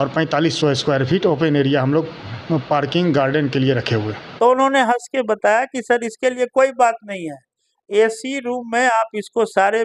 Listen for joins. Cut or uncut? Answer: cut